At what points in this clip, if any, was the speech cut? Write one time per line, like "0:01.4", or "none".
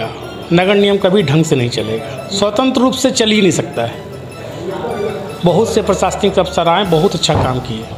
none